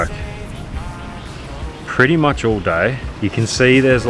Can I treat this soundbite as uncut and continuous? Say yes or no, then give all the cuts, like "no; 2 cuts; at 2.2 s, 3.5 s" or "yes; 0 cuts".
no; 1 cut; at 3.1 s